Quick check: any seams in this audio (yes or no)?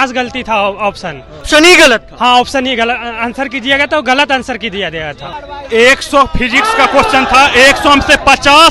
yes